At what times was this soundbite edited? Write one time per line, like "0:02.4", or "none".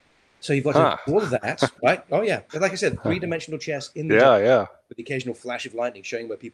none